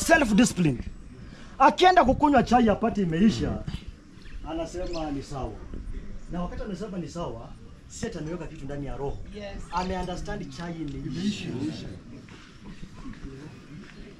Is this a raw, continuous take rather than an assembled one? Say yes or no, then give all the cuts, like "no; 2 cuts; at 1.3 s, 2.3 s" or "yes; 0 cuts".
yes; 0 cuts